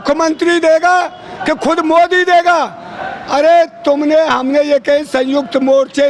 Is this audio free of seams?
yes; 0 cuts

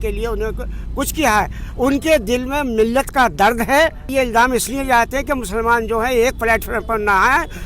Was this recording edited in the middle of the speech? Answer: yes; 1 cut; at 4.0 s

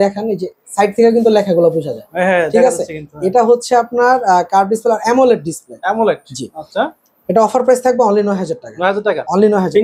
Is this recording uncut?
yes; 0 cuts

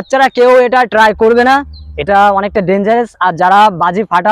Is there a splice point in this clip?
no; 0 cuts

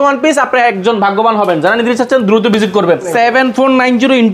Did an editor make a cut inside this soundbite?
yes; 1 cut; at 3.1 s

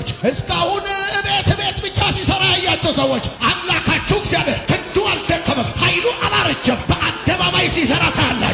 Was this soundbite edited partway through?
no; 0 cuts

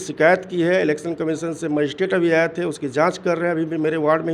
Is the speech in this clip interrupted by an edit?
no; 0 cuts

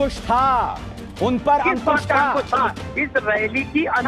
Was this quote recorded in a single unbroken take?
no; 1 cut; at 1.0 s

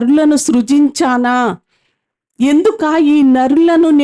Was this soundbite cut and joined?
no; 0 cuts

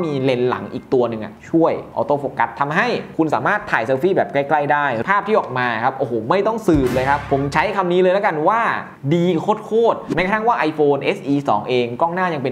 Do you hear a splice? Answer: yes; 2 cuts; at 5.0 s, 10.1 s

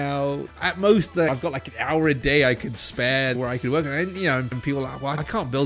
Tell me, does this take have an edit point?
yes; 1 cut; at 3.4 s

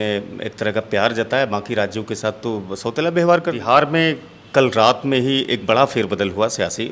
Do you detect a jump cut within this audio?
yes; 1 cut; at 3.6 s

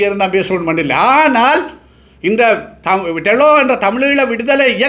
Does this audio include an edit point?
no; 0 cuts

